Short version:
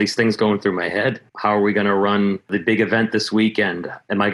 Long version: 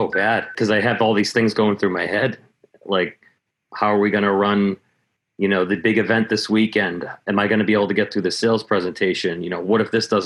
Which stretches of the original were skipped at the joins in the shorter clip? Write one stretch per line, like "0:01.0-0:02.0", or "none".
0:02.4-0:03.6
0:04.9-0:05.7